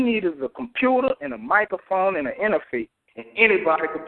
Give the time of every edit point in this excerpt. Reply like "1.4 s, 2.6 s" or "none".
none